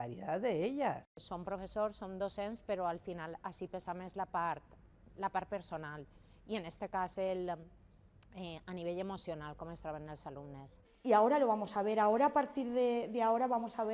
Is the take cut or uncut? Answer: cut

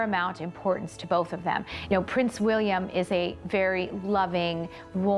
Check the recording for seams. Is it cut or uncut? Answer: cut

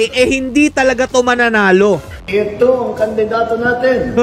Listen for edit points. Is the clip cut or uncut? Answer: cut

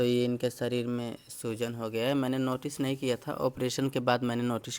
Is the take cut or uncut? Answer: uncut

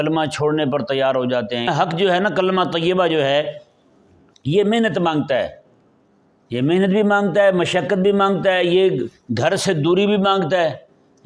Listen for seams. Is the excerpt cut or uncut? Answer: cut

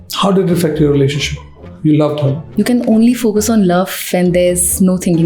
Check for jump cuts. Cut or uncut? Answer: cut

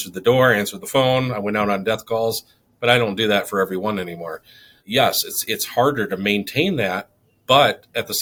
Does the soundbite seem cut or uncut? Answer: uncut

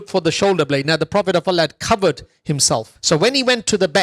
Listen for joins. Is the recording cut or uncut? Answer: cut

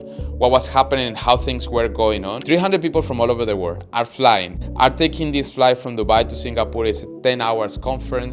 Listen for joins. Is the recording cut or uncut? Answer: cut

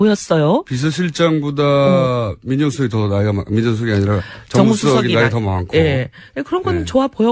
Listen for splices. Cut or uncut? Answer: cut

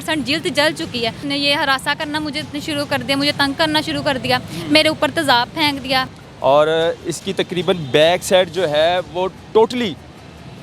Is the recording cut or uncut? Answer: cut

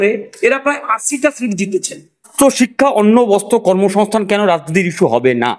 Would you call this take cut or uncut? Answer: cut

